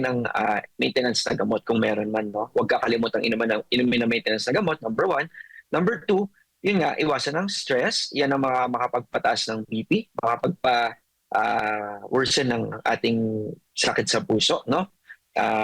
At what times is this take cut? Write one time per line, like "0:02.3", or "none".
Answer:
none